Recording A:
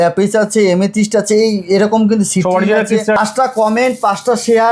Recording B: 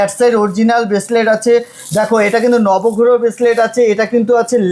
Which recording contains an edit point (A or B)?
A